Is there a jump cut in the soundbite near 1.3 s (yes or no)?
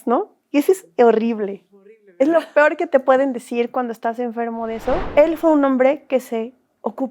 no